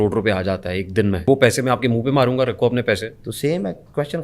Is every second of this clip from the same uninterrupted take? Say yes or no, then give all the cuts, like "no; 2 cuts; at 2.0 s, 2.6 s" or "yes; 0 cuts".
no; 1 cut; at 1.2 s